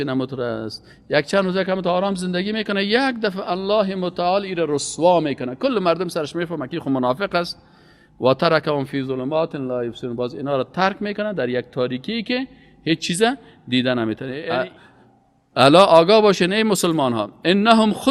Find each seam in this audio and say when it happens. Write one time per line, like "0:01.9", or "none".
0:14.3

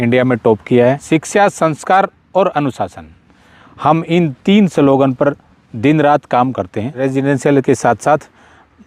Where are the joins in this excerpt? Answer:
0:01.0
0:06.9

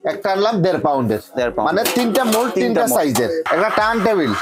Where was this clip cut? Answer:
0:03.5

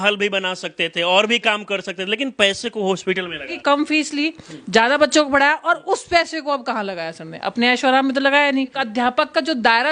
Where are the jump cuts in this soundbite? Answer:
0:03.5
0:08.8

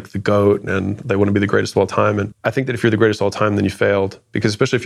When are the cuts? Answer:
0:02.3

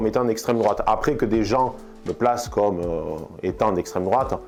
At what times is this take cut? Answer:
none

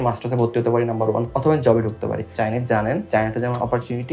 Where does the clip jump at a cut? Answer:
0:01.3
0:02.3
0:03.0

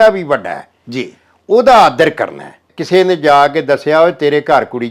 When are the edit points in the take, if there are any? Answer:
0:02.8

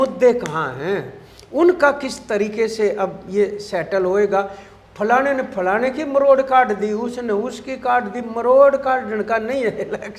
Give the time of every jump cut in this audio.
none

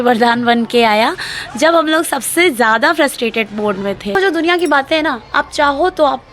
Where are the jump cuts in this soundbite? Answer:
0:04.2

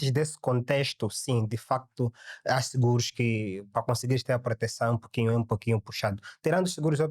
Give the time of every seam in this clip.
none

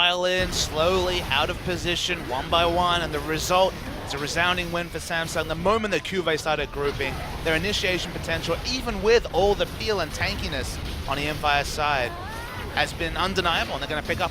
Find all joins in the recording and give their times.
0:10.8

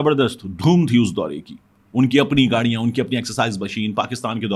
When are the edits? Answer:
none

